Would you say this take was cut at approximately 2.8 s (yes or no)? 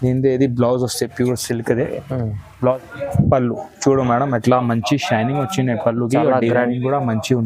yes